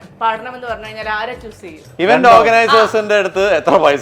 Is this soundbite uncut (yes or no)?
no